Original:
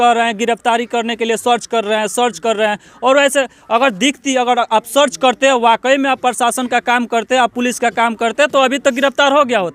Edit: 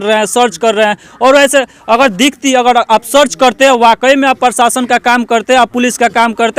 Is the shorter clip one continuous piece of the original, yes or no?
yes